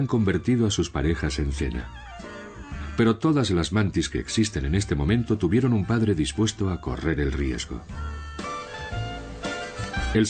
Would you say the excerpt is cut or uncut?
uncut